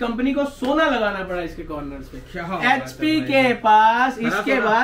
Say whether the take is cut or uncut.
uncut